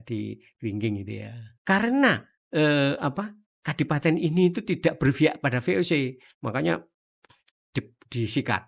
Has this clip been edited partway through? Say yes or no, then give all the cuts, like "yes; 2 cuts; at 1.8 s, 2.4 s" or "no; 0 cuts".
yes; 1 cut; at 1.5 s